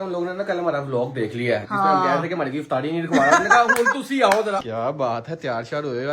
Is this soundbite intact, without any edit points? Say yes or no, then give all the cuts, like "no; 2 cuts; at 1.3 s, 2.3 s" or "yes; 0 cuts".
no; 1 cut; at 4.6 s